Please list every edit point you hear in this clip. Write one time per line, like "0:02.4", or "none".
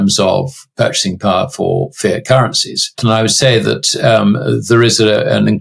0:03.0